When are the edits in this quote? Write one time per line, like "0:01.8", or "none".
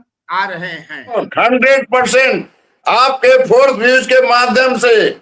0:01.2